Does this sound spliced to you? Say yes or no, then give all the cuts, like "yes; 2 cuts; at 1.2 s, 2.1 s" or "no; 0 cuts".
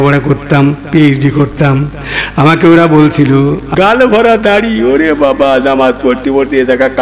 yes; 1 cut; at 3.6 s